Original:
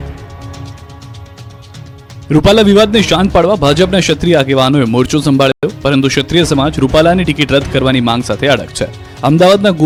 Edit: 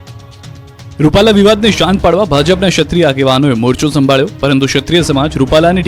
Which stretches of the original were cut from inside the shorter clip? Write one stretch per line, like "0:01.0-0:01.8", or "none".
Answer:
0:05.5-0:05.7